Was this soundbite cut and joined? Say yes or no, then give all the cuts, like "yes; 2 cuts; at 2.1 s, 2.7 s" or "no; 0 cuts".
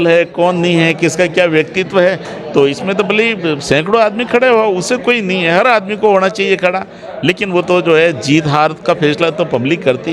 no; 0 cuts